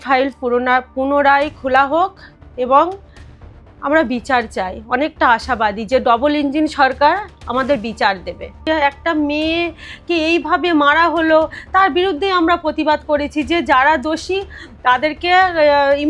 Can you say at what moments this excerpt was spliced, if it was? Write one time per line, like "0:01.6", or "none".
0:08.6